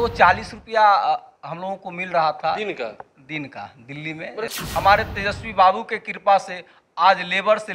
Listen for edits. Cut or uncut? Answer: cut